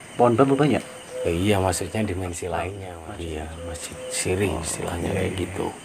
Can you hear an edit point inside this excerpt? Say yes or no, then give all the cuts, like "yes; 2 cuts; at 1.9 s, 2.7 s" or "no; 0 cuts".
yes; 1 cut; at 2.9 s